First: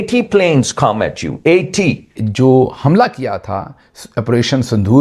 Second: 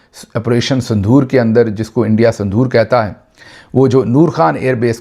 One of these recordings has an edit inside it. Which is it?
first; 1 cut; at 2.2 s

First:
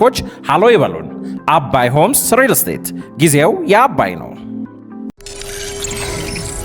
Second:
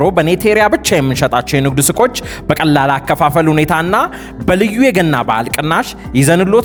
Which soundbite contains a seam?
first; 1 cut; at 5.2 s

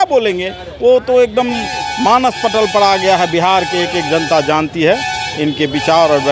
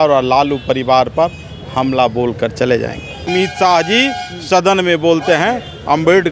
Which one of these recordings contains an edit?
second; 1 cut; at 3.3 s

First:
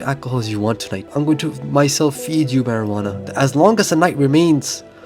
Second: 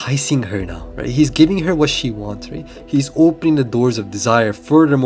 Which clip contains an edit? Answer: first; 2 cuts; at 1.1 s, 3.2 s

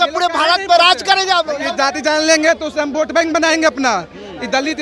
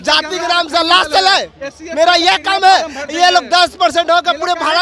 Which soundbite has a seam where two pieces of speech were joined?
first; 1 cut; at 1.6 s

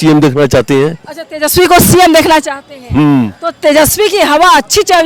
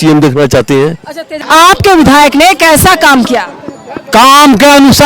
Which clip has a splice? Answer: second; 1 cut; at 1.3 s

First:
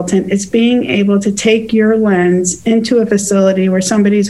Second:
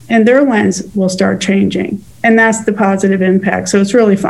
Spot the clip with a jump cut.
second; 1 cut; at 2.0 s

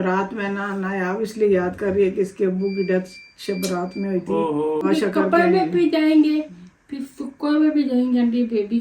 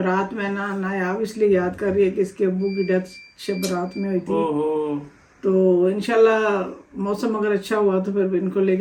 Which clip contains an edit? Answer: first; 1 cut; at 4.8 s

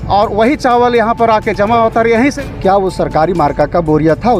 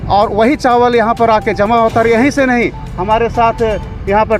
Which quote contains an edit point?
first; 1 cut; at 2.4 s

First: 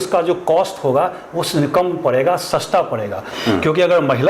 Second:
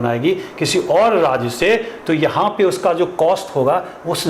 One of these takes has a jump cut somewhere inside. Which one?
first; 1 cut; at 3.3 s

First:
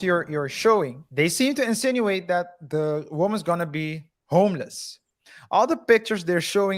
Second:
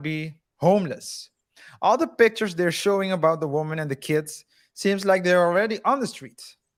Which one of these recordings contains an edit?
first; 1 cut; at 1.0 s

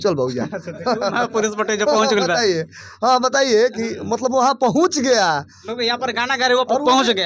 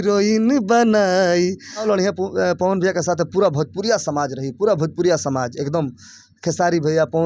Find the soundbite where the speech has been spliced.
second; 1 cut; at 1.8 s

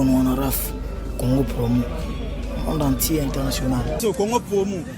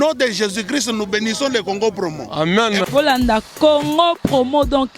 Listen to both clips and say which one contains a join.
first; 1 cut; at 4.0 s

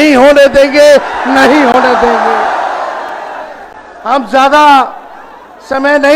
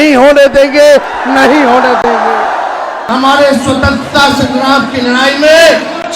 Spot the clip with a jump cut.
second; 1 cut; at 3.0 s

